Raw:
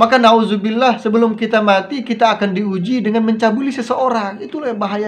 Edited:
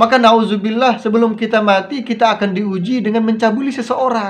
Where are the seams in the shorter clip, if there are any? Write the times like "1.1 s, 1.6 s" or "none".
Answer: none